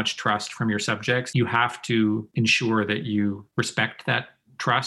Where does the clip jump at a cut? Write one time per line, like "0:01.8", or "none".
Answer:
0:01.3
0:02.3
0:03.4